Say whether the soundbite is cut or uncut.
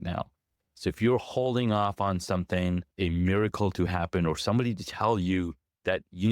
cut